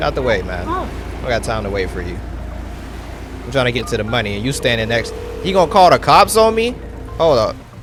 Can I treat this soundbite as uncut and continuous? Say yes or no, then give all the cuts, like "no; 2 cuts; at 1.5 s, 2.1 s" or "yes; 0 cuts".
yes; 0 cuts